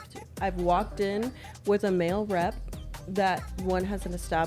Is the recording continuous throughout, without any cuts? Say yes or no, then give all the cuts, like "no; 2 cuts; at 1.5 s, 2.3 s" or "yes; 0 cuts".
yes; 0 cuts